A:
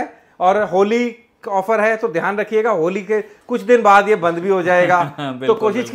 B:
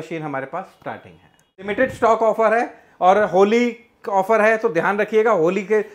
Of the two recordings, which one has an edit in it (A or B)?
B